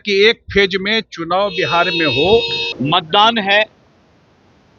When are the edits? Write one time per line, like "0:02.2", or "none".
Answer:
0:02.6